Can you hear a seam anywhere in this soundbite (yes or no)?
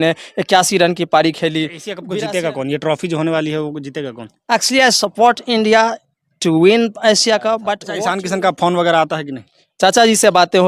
yes